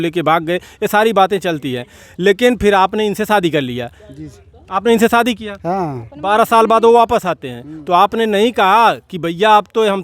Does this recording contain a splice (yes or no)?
no